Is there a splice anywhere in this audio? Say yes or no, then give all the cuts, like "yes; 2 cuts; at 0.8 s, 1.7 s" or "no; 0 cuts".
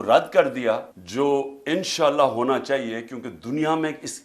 yes; 1 cut; at 1.0 s